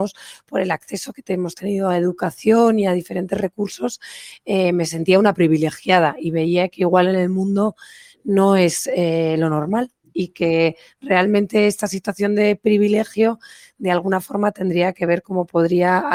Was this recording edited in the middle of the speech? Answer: no; 0 cuts

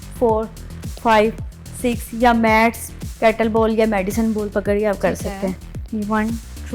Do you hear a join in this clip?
no; 0 cuts

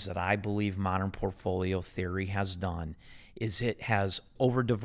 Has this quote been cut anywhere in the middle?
no; 0 cuts

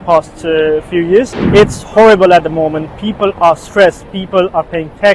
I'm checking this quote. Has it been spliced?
yes; 1 cut; at 1.4 s

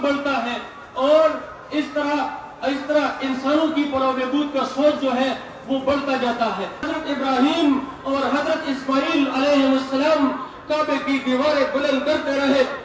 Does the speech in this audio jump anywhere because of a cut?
yes; 1 cut; at 6.9 s

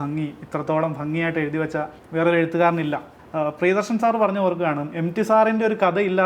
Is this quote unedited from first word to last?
no; 2 cuts; at 2.0 s, 3.1 s

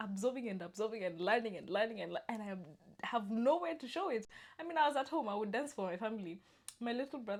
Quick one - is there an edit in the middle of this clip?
no; 0 cuts

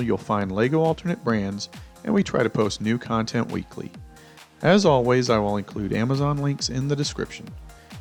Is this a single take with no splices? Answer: yes; 0 cuts

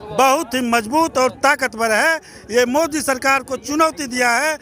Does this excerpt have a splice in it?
no; 0 cuts

